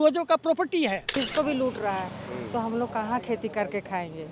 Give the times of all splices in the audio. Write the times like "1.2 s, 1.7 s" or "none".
1.1 s